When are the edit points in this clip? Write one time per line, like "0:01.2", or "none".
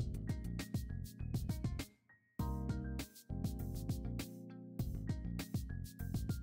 0:02.2
0:05.5